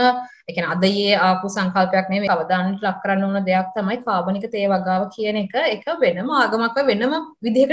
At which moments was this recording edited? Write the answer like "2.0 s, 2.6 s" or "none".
2.3 s

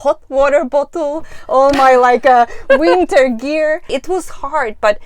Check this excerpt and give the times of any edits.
3.9 s

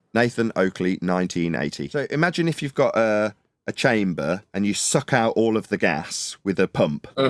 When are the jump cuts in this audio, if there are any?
1.8 s

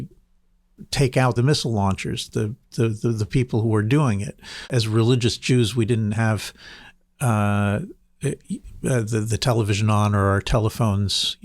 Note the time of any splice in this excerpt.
1.4 s, 4.7 s

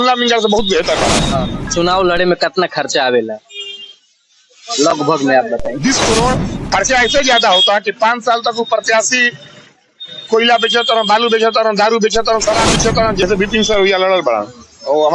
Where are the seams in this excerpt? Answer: 1.6 s, 6.5 s, 13.2 s

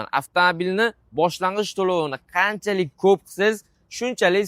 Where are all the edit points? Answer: none

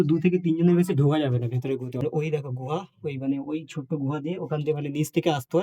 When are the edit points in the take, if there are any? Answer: 2.0 s

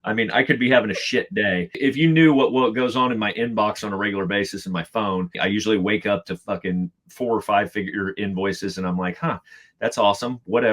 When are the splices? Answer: 1.8 s, 5.3 s

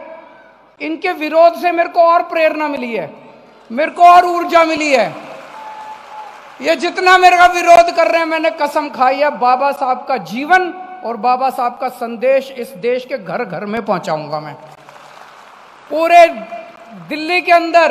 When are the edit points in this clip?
15.5 s

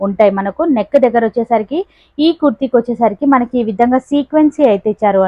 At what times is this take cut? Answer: none

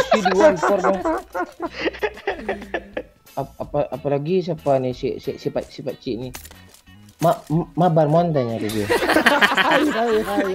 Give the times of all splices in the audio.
3.2 s

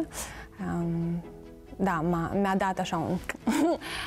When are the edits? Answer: none

